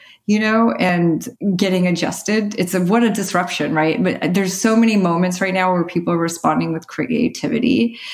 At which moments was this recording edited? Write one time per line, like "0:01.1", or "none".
0:01.0